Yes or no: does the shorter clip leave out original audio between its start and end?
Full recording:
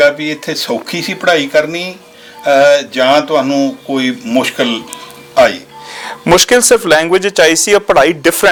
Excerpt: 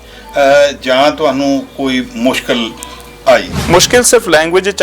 yes